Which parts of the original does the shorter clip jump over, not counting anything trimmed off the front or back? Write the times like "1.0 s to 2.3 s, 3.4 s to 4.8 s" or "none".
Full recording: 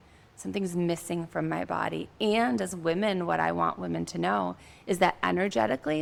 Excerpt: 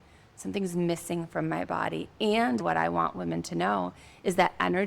2.6 s to 3.2 s